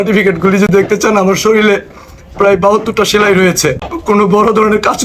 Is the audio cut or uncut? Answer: cut